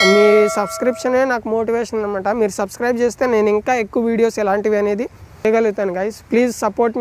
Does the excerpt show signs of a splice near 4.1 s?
no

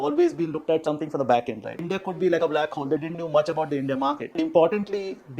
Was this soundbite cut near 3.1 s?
no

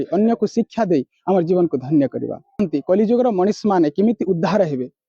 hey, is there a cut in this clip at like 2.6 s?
yes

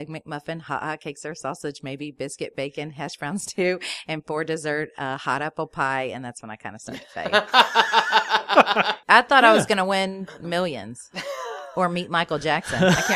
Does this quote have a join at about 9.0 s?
yes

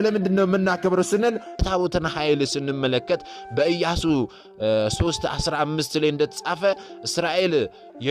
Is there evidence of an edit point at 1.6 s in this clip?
yes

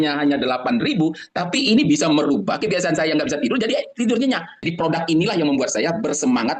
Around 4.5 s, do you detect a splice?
yes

